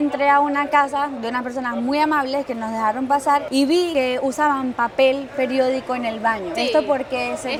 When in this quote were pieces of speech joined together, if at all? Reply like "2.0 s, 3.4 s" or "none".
none